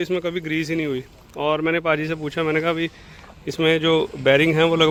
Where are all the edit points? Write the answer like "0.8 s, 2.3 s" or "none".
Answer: none